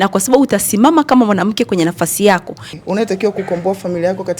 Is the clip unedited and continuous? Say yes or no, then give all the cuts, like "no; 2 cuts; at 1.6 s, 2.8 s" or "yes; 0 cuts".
no; 1 cut; at 2.6 s